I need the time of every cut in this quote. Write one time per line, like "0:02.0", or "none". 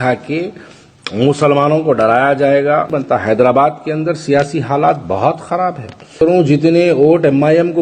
0:02.9
0:06.2